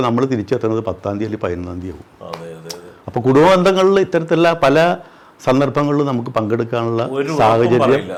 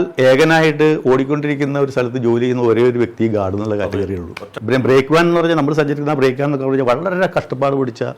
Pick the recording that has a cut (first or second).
second